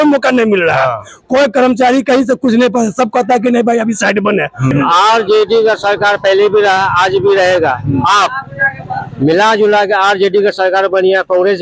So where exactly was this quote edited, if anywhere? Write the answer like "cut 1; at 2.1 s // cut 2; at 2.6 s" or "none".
cut 1; at 4.7 s